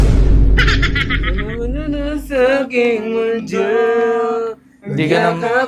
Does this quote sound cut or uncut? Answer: uncut